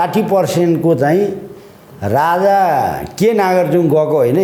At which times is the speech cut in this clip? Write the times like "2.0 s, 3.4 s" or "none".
none